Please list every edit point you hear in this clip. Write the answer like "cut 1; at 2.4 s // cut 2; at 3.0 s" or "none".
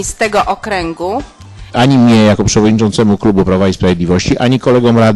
cut 1; at 1.7 s